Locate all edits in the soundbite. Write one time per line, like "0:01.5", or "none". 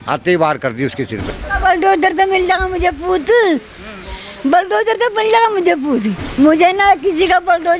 0:01.2
0:06.2